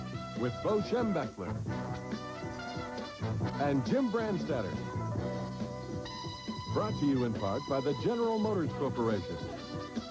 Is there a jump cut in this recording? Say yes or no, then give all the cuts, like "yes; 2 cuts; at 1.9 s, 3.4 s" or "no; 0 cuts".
yes; 1 cut; at 1.5 s